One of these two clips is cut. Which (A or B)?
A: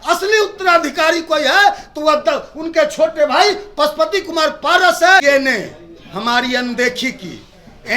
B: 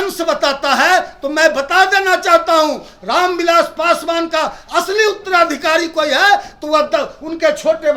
A